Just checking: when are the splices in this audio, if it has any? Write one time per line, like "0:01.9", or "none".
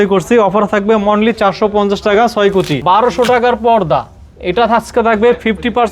0:02.8

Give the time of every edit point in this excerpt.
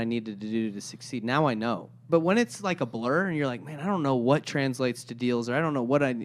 0:02.0

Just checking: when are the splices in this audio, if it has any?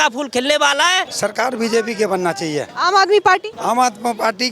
0:01.1
0:02.7
0:03.5

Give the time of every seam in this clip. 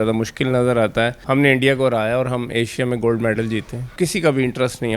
0:01.2
0:03.9

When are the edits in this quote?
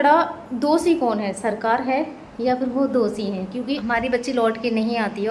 0:03.8

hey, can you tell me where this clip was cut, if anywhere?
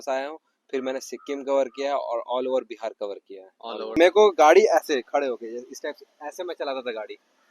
0:03.9

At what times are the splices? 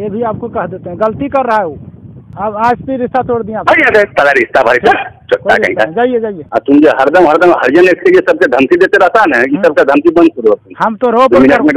0:02.2
0:06.4

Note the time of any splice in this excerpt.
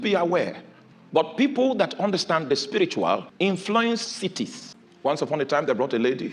0:03.6
0:05.1

